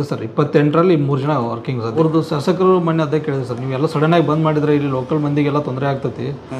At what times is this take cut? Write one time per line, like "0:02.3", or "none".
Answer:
0:01.9